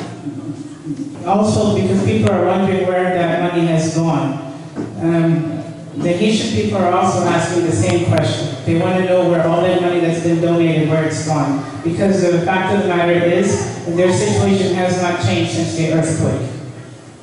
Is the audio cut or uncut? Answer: cut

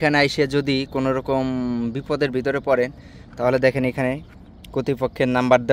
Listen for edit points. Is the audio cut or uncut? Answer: uncut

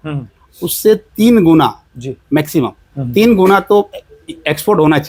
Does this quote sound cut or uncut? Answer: uncut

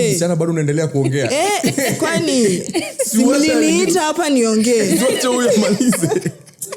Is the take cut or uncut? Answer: uncut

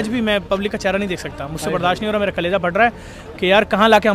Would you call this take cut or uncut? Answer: uncut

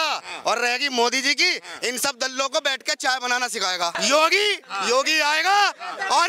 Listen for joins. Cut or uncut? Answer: cut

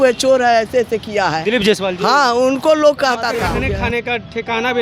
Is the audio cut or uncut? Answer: cut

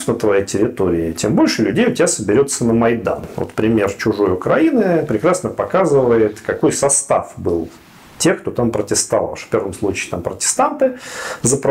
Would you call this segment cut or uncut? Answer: uncut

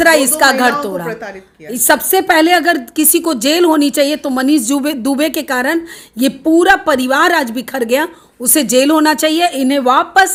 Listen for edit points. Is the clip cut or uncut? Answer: uncut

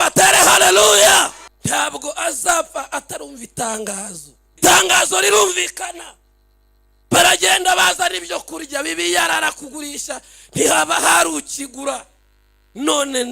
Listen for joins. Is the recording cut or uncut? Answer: cut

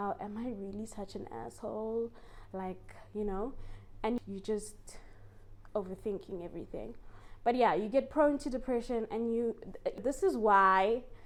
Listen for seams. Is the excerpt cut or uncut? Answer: uncut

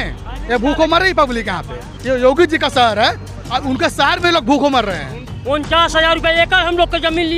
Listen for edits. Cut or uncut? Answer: cut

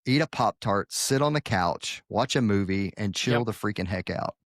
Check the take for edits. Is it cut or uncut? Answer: uncut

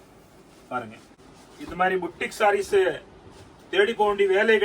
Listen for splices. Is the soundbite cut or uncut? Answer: cut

